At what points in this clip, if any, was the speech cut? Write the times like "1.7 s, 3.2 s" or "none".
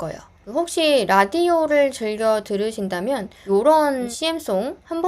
3.3 s, 4.1 s